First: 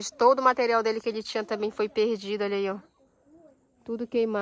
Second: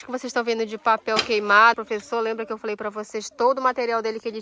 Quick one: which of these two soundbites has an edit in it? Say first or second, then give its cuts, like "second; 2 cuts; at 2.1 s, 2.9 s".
second; 1 cut; at 1.8 s